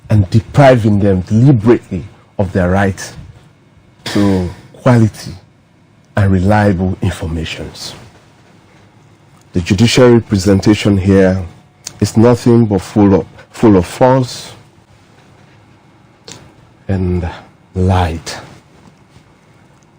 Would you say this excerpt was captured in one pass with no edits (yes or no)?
yes